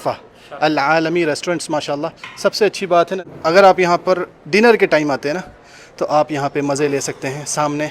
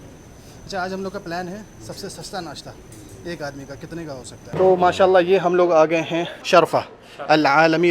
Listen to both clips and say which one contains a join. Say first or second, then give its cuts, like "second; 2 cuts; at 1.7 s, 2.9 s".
second; 1 cut; at 4.4 s